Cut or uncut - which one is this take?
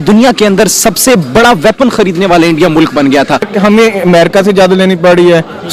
cut